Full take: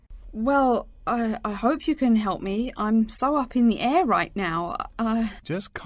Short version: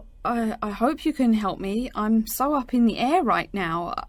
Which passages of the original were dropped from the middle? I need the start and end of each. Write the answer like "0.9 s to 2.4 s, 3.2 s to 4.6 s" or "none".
none